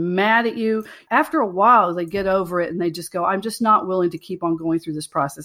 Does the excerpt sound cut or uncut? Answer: cut